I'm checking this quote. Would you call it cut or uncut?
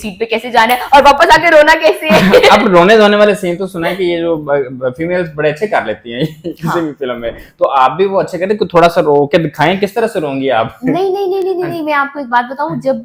uncut